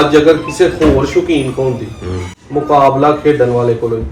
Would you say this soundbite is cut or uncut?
uncut